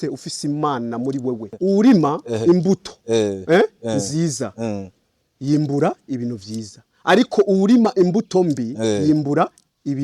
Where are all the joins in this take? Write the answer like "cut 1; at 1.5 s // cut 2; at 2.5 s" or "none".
cut 1; at 1.5 s